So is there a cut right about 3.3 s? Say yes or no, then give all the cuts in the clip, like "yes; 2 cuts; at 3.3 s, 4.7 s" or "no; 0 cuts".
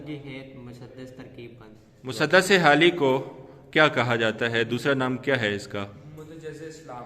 no; 1 cut; at 1.7 s